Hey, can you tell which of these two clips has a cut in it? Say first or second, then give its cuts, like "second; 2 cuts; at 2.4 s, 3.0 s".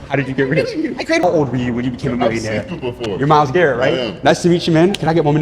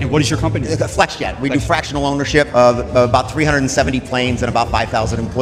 first; 1 cut; at 1.2 s